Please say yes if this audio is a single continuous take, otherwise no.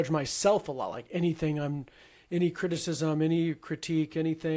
yes